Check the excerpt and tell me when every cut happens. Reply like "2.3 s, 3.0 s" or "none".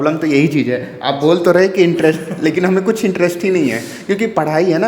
none